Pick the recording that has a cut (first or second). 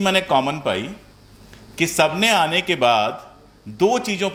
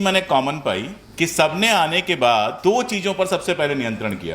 second